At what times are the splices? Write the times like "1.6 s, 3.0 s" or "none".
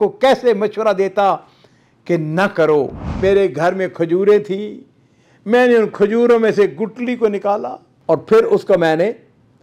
3.1 s, 7.9 s